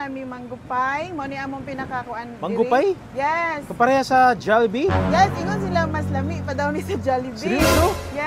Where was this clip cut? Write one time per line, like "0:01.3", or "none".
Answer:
none